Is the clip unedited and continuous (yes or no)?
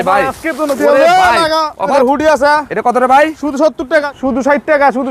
no